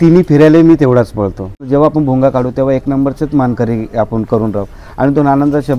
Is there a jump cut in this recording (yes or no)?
yes